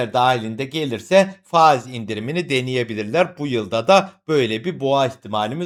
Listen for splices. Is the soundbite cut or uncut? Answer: uncut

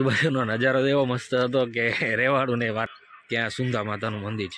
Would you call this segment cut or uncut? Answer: cut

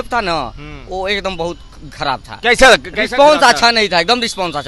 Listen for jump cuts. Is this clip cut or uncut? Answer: uncut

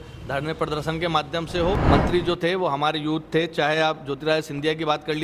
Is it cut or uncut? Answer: cut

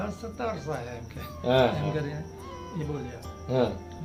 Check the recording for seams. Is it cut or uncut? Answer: uncut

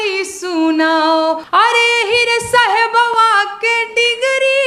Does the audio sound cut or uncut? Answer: cut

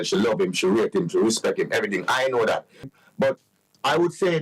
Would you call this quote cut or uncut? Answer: cut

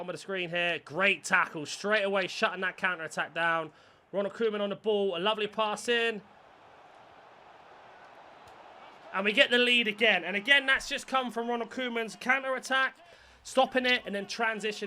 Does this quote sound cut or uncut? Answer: uncut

